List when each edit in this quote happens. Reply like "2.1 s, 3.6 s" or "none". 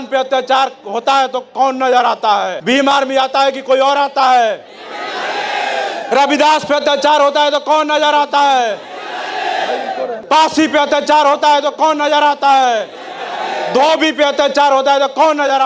2.6 s, 10.2 s